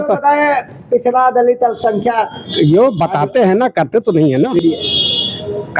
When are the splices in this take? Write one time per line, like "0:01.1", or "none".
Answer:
none